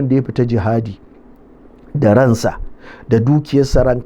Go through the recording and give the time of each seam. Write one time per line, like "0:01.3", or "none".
none

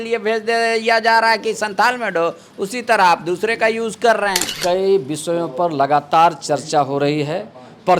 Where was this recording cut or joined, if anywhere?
0:04.5

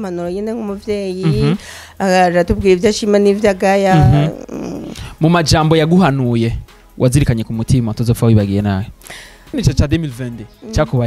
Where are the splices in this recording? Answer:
0:09.6

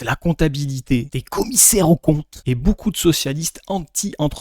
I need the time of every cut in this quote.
0:02.3

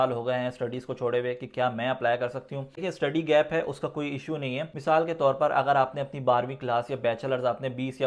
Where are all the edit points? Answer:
none

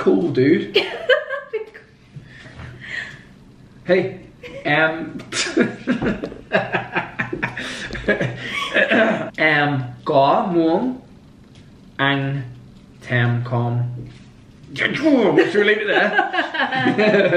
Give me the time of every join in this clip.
0:09.3

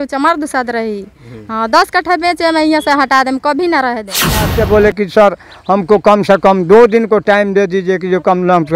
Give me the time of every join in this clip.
0:04.5

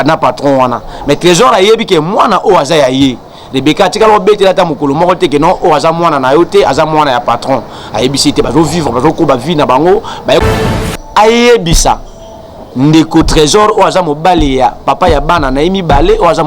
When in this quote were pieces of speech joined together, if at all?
0:10.4

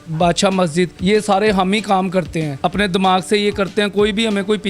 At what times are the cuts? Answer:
0:00.9
0:02.5

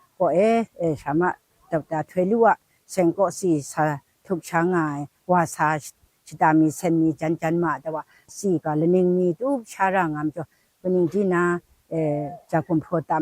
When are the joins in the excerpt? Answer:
0:08.3

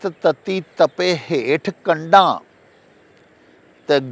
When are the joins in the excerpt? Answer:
none

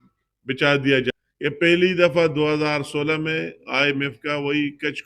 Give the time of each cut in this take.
0:01.1

